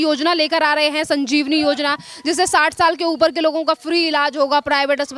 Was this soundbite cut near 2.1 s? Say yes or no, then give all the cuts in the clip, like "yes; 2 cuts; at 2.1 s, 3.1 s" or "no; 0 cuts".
no; 0 cuts